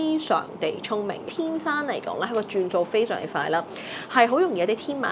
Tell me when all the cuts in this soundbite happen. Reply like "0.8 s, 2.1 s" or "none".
1.2 s